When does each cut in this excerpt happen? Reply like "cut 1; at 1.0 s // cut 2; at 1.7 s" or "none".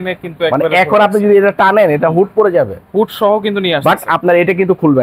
none